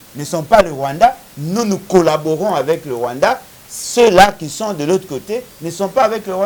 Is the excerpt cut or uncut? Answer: uncut